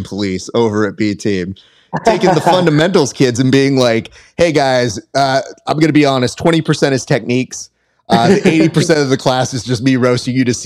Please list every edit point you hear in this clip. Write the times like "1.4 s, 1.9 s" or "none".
none